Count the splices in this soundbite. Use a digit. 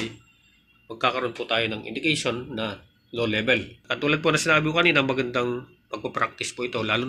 1